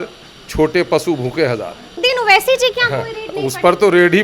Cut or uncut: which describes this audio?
cut